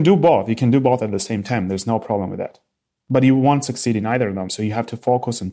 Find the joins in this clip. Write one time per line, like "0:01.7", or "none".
0:04.5